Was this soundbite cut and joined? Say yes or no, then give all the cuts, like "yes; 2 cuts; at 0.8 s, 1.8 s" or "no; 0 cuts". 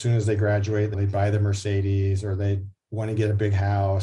yes; 1 cut; at 0.9 s